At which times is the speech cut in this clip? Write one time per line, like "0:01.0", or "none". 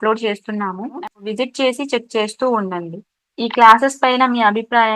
0:01.0